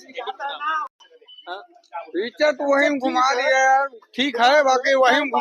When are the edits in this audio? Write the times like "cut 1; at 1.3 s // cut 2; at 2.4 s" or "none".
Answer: cut 1; at 0.9 s